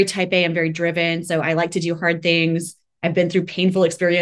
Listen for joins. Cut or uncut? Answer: uncut